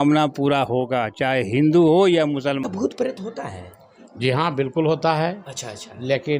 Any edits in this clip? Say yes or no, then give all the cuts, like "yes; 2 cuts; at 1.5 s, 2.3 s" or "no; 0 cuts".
yes; 1 cut; at 2.6 s